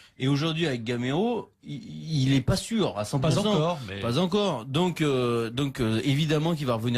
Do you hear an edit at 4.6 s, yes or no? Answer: yes